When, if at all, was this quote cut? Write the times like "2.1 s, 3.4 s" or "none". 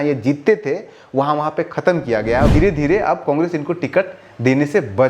2.5 s